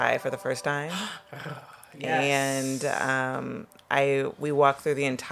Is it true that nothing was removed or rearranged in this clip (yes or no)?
yes